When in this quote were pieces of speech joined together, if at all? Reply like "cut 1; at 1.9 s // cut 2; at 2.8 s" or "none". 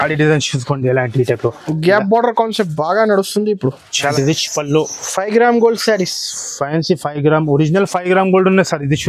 cut 1; at 4.1 s